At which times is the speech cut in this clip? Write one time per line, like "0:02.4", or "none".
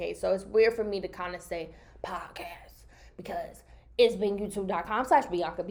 none